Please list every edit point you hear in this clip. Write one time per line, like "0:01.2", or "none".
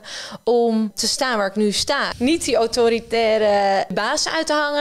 0:01.0
0:02.1
0:03.9